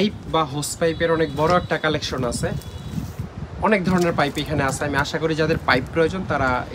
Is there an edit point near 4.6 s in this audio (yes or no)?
no